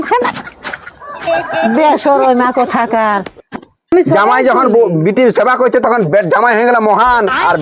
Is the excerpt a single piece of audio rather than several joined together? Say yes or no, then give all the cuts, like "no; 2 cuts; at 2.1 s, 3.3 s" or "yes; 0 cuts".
no; 1 cut; at 3.9 s